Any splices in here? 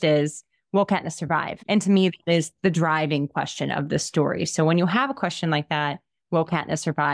yes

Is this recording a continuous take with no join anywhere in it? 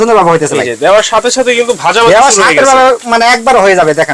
yes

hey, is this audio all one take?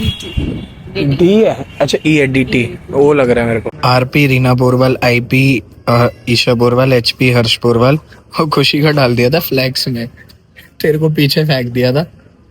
no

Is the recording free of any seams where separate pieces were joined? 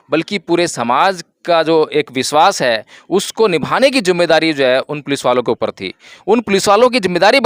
yes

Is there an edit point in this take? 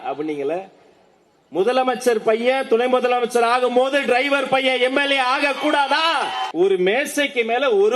yes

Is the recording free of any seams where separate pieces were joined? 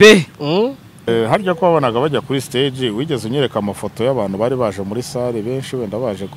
no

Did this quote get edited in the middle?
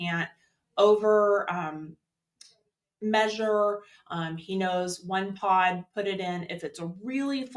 no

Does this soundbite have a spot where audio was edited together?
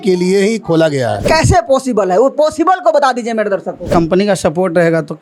yes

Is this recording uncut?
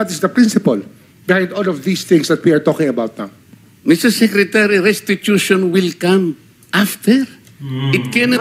yes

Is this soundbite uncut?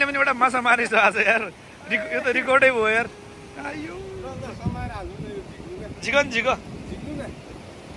yes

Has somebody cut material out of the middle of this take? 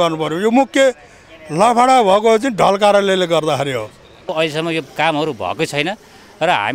yes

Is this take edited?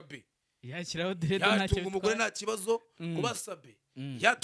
no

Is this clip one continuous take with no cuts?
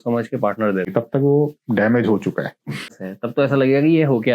no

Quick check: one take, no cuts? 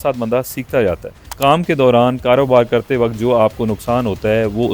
no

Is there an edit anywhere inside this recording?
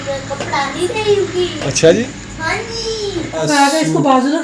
yes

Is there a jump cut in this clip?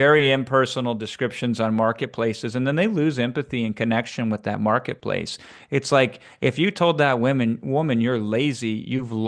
no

